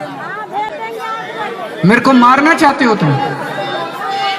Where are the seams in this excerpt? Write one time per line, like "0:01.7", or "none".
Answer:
none